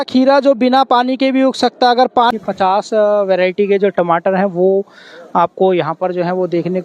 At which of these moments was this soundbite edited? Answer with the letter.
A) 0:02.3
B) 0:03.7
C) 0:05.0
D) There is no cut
A